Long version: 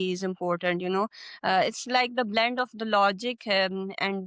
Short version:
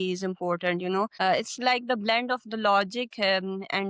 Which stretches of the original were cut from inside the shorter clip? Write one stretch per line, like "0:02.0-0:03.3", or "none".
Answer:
0:01.1-0:01.4